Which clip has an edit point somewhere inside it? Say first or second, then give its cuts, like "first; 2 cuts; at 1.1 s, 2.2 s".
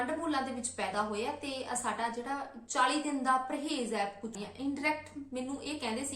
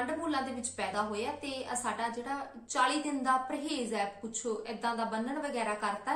first; 1 cut; at 4.4 s